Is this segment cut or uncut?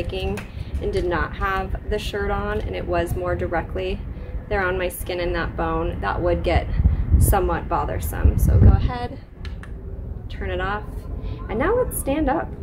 uncut